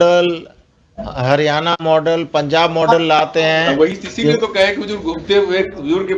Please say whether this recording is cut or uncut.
uncut